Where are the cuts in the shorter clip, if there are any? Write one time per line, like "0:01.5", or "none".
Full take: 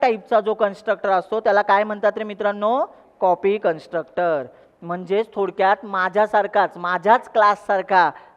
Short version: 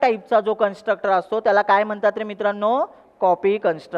none